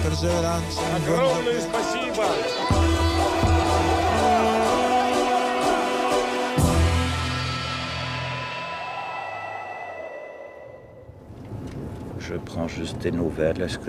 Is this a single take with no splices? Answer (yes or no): yes